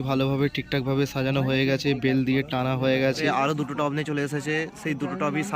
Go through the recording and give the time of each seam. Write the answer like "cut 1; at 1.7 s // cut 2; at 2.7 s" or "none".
cut 1; at 3.2 s

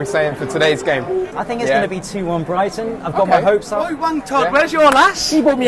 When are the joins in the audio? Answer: cut 1; at 1.3 s

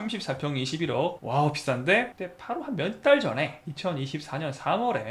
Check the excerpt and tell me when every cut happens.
none

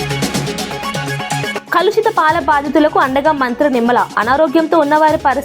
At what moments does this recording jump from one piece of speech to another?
cut 1; at 1.5 s

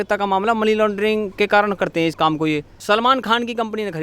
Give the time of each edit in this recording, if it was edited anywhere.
cut 1; at 2.7 s

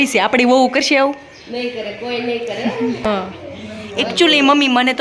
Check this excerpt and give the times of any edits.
cut 1; at 3.0 s

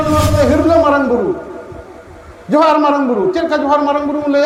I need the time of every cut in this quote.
none

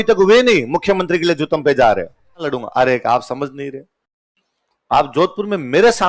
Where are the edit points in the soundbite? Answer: cut 1; at 2.6 s

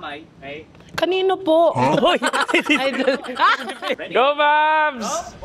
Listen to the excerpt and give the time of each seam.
cut 1; at 4.0 s

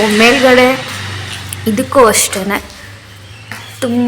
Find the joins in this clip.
none

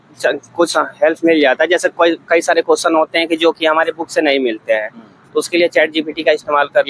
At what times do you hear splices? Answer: none

